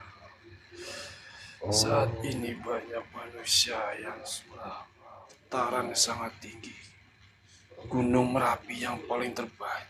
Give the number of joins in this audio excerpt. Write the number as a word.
one